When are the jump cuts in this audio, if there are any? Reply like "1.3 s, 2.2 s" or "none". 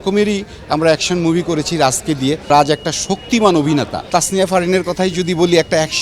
2.5 s, 4.1 s